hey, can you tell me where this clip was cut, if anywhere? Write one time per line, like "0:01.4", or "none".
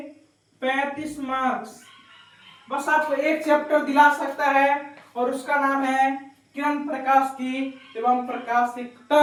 none